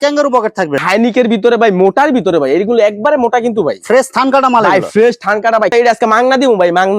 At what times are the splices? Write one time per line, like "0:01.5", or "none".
0:00.8
0:05.7